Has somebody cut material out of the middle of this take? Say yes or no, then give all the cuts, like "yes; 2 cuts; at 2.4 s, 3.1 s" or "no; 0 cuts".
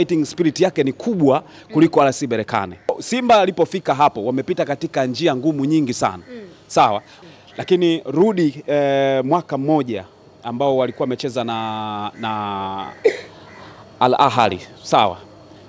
yes; 2 cuts; at 3.0 s, 7.2 s